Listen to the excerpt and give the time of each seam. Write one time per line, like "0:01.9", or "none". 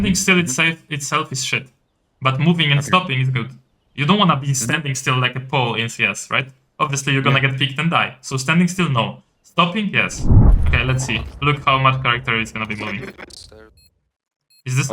0:10.5